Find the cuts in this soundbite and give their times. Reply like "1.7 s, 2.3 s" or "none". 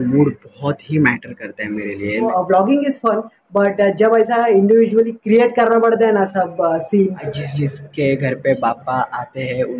2.3 s, 7.2 s